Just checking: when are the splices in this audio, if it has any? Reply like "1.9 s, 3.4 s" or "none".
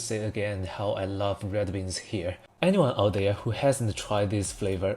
2.4 s